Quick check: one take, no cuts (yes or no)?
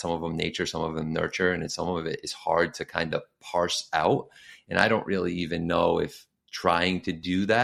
yes